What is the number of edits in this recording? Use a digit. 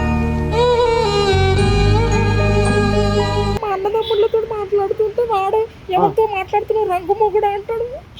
1